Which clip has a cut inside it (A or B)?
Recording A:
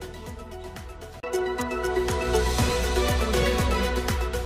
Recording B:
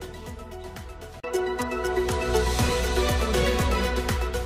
B